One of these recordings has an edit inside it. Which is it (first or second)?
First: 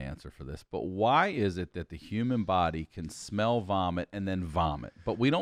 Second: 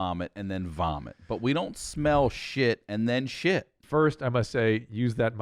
second